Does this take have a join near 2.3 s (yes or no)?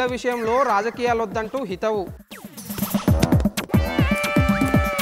no